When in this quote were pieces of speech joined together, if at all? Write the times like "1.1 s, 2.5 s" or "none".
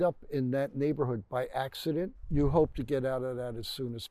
2.1 s